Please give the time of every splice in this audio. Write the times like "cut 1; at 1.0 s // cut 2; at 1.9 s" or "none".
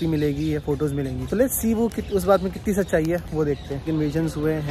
cut 1; at 1.2 s // cut 2; at 3.9 s